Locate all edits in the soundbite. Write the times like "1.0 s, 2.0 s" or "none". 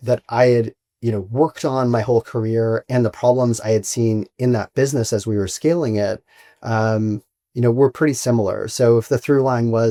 none